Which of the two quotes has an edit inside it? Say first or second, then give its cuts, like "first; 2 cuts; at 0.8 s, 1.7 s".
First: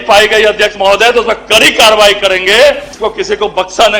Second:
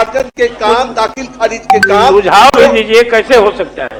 first; 1 cut; at 2.9 s